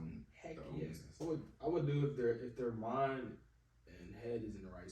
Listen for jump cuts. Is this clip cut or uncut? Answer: cut